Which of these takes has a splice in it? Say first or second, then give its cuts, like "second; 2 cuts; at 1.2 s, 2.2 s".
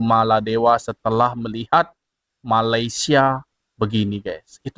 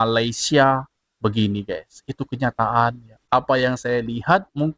second; 1 cut; at 3.1 s